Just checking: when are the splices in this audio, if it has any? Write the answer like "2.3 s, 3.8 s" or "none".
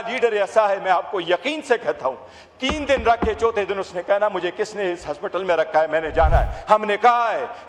none